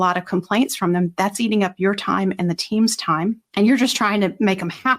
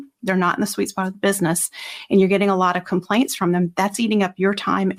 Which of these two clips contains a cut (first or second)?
first